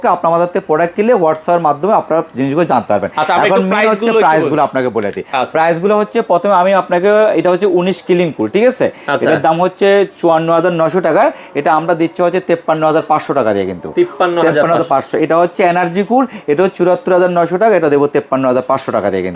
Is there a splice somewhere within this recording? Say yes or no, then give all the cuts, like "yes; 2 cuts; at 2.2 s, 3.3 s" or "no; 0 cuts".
no; 0 cuts